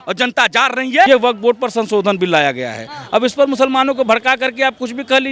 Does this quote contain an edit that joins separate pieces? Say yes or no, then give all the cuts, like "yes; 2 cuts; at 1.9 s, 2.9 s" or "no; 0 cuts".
yes; 1 cut; at 1.1 s